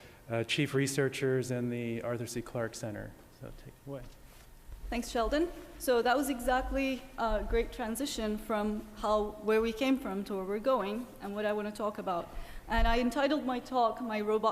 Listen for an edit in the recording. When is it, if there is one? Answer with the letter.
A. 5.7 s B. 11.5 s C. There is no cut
B